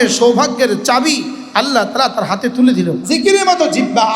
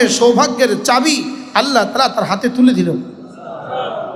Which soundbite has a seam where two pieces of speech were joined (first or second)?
first